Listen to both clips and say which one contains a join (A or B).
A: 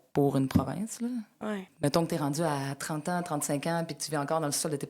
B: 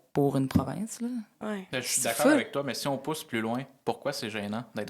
A